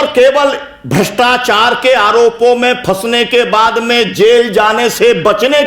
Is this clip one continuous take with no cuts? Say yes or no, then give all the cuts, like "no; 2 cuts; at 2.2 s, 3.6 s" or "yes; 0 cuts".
yes; 0 cuts